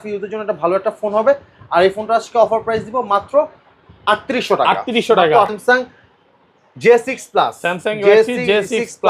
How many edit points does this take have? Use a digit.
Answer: 1